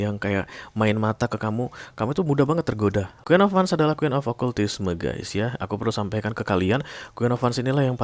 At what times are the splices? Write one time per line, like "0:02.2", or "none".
0:03.1